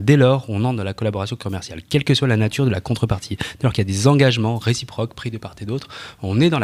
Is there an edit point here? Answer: no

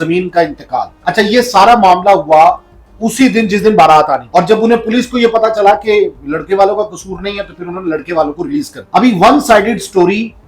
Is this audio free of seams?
no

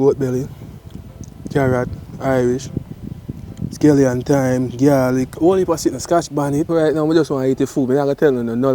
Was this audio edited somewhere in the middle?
yes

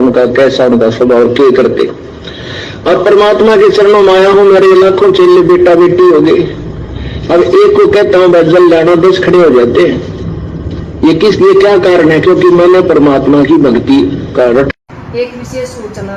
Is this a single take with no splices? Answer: no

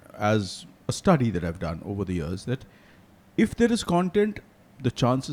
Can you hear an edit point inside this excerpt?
no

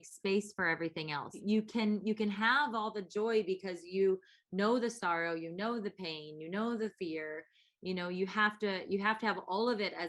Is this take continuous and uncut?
no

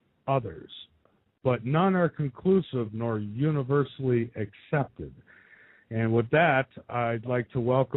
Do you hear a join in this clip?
yes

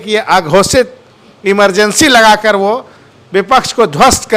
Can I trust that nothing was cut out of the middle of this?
yes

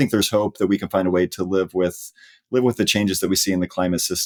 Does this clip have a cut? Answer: no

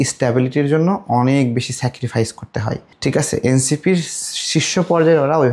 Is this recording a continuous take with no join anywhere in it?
yes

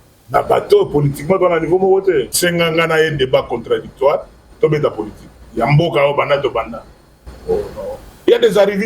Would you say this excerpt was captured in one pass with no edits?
no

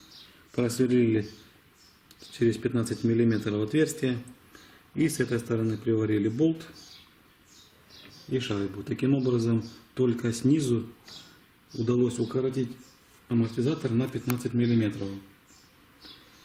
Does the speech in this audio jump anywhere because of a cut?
yes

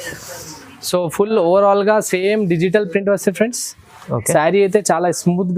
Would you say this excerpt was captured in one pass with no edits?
yes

